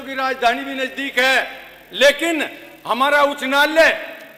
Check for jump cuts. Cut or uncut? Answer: uncut